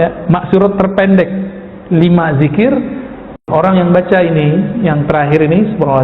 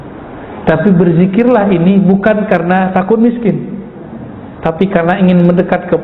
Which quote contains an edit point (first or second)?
first